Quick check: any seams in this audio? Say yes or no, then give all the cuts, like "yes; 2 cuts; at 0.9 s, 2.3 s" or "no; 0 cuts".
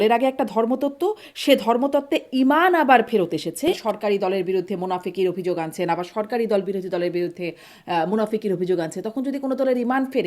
yes; 1 cut; at 3.8 s